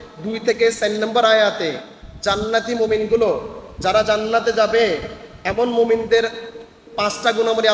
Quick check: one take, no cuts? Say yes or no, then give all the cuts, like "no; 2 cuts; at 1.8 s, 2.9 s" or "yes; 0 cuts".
yes; 0 cuts